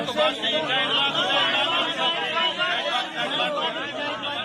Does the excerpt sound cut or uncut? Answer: uncut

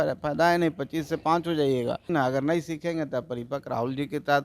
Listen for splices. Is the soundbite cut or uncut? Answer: cut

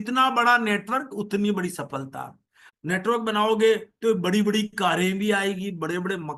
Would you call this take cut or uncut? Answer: cut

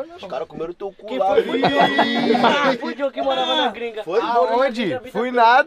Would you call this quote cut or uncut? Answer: uncut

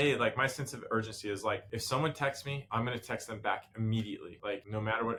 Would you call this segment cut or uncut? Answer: uncut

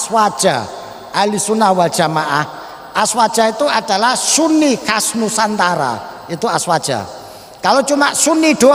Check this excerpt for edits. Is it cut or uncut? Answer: uncut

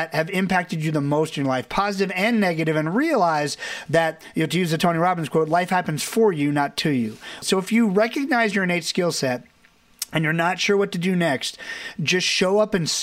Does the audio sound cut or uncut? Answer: cut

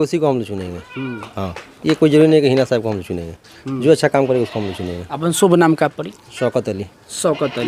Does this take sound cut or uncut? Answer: uncut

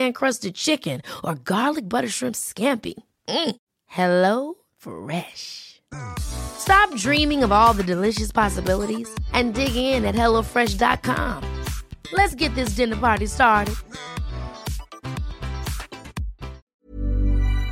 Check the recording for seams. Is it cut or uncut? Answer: cut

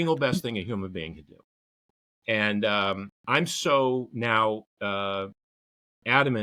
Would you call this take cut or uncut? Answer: uncut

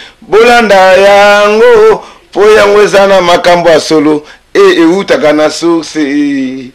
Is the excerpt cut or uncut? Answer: uncut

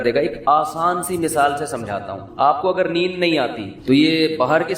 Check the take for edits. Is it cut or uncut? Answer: cut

